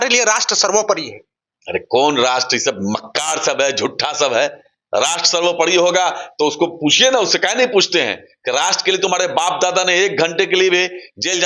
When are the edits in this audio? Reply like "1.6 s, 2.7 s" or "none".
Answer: none